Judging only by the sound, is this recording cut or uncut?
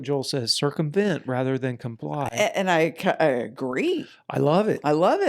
uncut